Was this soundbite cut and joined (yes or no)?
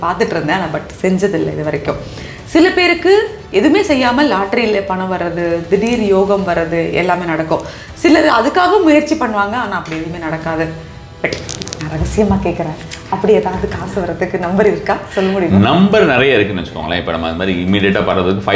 no